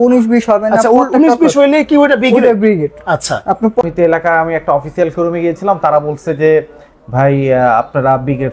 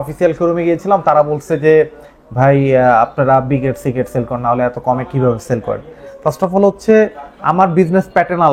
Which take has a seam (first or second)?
first